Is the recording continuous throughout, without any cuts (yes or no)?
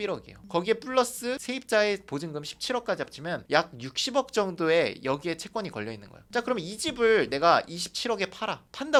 yes